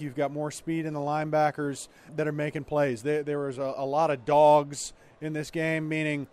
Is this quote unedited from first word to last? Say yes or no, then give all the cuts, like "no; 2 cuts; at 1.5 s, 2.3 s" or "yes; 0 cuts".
no; 1 cut; at 2.1 s